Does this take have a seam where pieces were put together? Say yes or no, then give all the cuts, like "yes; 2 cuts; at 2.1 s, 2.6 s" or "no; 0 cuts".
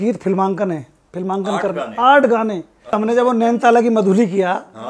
yes; 1 cut; at 3.0 s